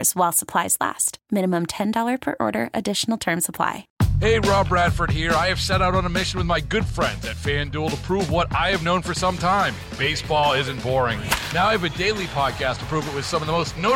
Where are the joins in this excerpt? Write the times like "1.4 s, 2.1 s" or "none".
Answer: 3.8 s